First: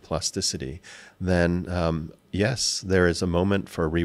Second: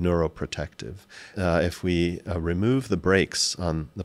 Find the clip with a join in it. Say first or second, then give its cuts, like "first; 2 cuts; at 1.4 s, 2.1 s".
second; 1 cut; at 1.3 s